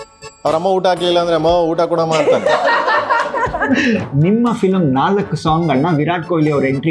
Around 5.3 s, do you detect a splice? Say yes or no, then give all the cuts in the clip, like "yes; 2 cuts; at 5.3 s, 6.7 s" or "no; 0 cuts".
no; 1 cut; at 4.1 s